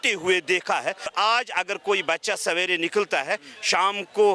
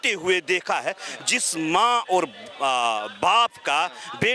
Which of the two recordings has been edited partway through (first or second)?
first